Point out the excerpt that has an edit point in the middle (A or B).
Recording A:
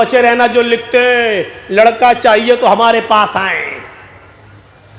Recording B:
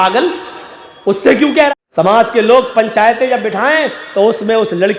B